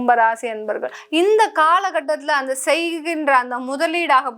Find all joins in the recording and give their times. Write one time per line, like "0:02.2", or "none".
0:01.0